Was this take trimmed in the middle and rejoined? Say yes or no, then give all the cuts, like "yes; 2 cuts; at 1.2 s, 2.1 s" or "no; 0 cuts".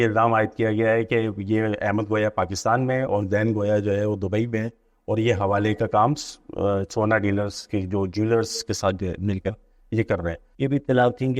yes; 1 cut; at 10.4 s